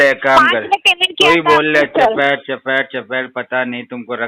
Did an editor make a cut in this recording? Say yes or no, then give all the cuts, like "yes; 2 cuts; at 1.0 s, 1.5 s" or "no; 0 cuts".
no; 0 cuts